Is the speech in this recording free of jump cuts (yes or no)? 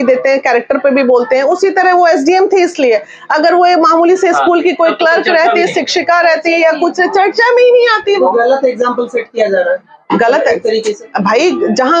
yes